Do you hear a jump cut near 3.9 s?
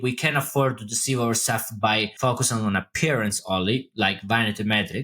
no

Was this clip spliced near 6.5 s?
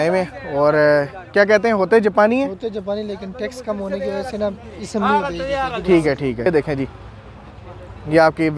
yes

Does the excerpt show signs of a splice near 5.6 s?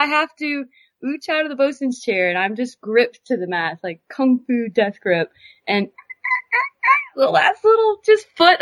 no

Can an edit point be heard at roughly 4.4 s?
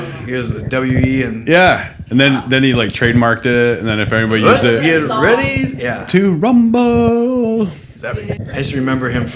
no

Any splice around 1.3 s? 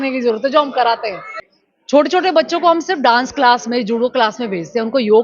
yes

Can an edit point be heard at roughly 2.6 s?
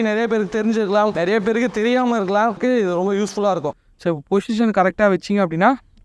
yes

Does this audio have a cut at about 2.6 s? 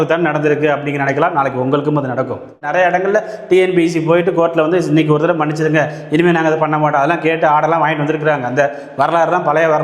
yes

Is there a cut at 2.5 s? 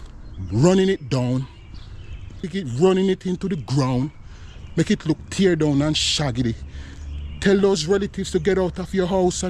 yes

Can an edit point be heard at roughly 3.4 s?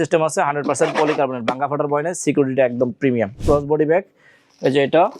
yes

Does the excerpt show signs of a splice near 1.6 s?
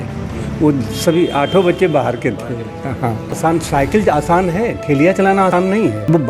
no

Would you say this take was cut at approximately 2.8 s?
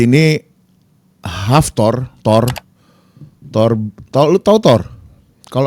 no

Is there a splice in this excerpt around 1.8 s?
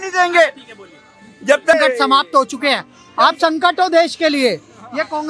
yes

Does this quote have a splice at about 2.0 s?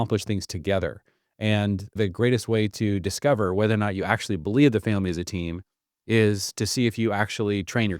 yes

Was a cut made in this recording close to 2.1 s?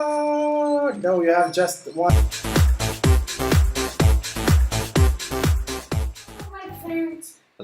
yes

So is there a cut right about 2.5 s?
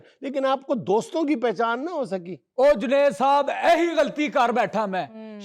no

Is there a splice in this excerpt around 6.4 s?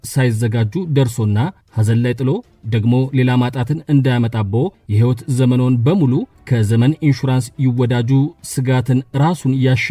yes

